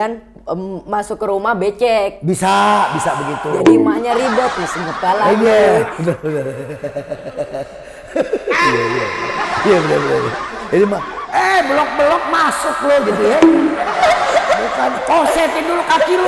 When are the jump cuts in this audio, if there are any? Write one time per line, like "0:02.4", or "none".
none